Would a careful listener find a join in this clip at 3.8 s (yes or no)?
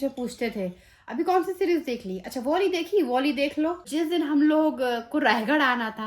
yes